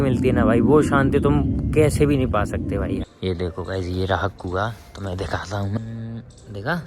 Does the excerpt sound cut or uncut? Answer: cut